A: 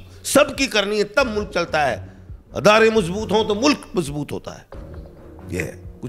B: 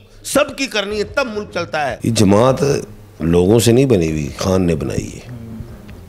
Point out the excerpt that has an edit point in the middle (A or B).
B